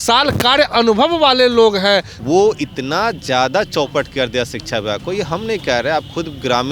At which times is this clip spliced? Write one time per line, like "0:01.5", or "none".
0:02.1